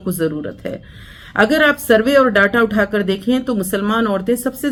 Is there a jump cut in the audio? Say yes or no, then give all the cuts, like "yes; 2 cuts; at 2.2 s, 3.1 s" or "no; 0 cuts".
no; 0 cuts